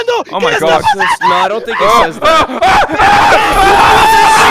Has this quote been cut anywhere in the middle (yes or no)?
no